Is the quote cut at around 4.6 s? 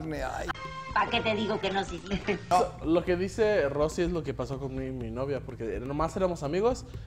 no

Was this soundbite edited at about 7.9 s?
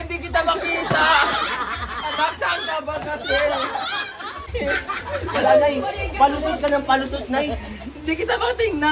no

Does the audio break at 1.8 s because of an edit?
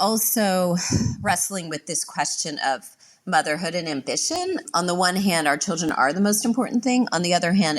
no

